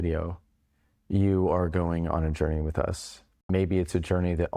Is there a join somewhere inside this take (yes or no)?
yes